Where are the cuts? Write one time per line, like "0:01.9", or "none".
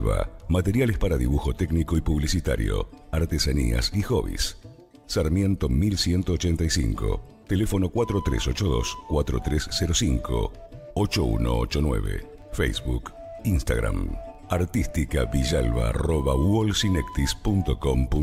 none